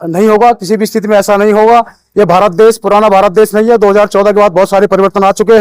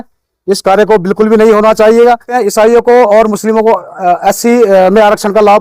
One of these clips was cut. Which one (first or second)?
second